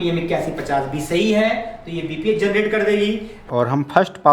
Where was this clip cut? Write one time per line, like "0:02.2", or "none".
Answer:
0:03.3